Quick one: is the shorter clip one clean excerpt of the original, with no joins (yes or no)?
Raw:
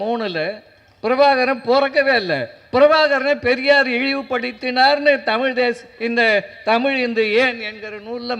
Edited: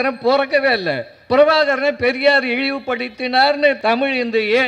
no